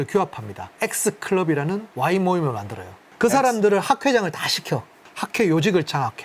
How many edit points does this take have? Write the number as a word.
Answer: two